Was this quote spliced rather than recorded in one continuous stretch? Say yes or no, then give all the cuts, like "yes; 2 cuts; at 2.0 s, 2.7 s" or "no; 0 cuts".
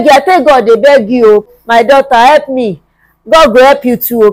yes; 1 cut; at 1.5 s